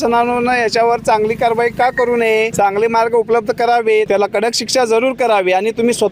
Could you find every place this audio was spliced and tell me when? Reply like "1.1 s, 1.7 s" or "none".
2.5 s, 4.1 s